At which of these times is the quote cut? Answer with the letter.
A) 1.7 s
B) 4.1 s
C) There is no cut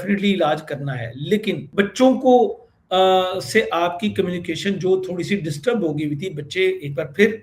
A